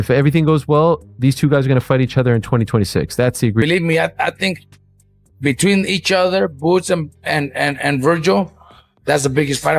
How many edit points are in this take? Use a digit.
1